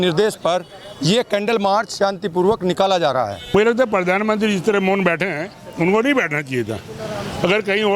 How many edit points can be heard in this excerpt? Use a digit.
1